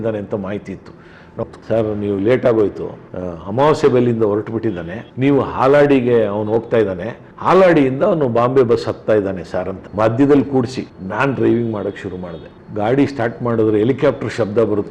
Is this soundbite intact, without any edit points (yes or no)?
no